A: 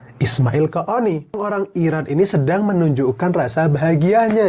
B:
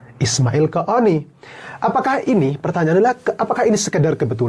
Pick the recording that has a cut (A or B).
A